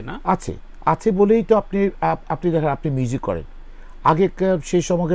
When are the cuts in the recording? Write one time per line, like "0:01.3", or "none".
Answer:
none

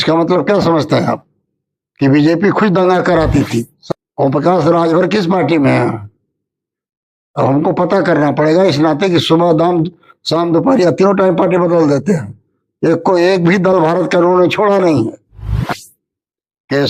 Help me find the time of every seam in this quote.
0:03.8
0:15.7

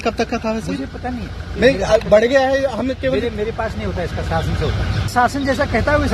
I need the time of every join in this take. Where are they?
0:01.6
0:05.0

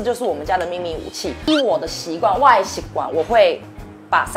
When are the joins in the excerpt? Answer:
0:01.5

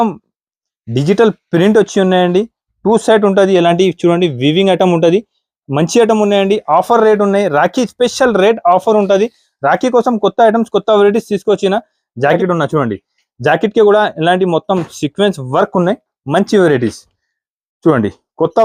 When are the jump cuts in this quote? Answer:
0:12.4

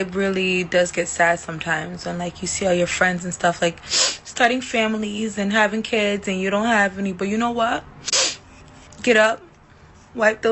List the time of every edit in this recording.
none

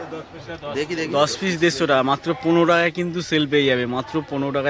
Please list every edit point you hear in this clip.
none

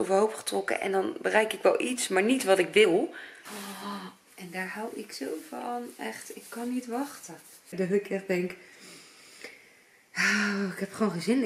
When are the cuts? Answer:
0:02.9
0:07.7

